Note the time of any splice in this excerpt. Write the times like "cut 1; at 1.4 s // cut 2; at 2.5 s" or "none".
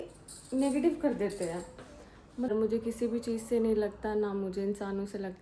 cut 1; at 2.5 s